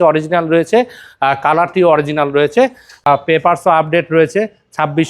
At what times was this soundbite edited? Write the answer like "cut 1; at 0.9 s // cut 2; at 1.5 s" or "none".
cut 1; at 3.0 s